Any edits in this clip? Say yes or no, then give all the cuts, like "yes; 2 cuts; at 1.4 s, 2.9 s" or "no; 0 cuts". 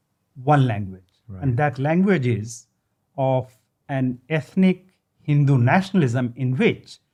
no; 0 cuts